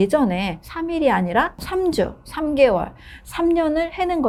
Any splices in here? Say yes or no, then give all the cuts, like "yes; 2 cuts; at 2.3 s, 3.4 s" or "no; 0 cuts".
no; 0 cuts